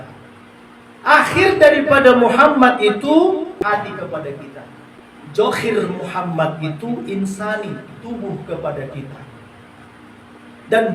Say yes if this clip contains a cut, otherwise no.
yes